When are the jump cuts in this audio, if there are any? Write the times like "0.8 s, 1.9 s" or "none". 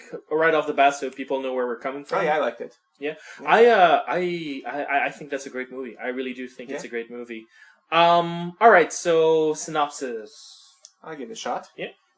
1.8 s